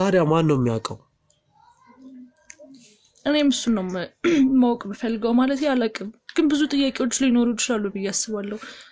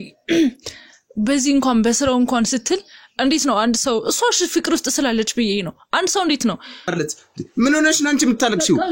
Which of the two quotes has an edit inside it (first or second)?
second